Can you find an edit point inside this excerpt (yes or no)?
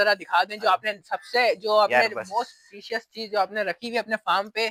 no